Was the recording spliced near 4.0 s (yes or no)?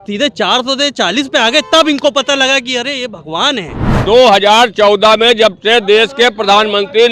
yes